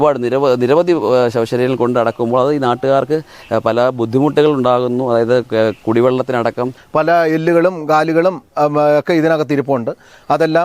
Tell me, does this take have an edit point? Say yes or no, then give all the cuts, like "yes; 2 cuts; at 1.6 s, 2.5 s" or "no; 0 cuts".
yes; 1 cut; at 6.8 s